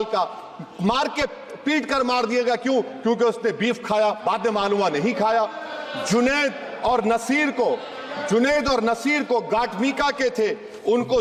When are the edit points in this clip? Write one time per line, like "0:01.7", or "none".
none